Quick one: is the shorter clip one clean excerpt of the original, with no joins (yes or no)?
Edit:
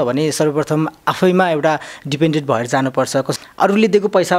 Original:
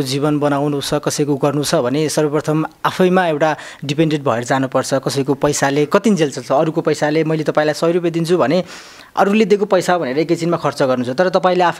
no